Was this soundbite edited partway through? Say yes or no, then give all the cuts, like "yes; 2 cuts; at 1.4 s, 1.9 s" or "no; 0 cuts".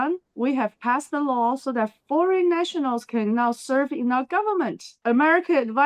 yes; 1 cut; at 4.9 s